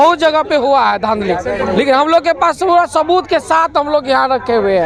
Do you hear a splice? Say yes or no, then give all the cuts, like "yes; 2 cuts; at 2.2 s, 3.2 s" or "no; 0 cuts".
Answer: no; 0 cuts